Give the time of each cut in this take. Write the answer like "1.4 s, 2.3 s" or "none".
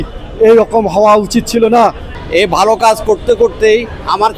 2.0 s